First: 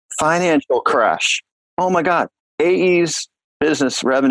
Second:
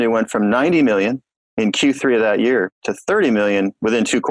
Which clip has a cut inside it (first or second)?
first